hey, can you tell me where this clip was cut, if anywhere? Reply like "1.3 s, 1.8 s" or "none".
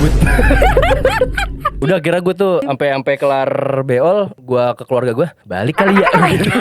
1.7 s, 2.6 s, 4.4 s, 5.4 s